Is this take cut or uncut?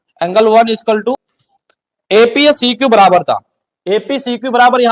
cut